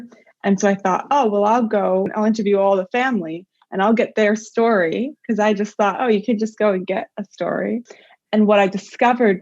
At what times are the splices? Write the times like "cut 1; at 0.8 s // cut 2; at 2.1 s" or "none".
cut 1; at 2.1 s // cut 2; at 7.9 s